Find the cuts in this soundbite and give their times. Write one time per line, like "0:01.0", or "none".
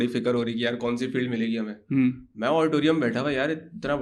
none